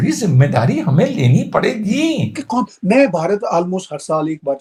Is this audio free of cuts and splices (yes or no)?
yes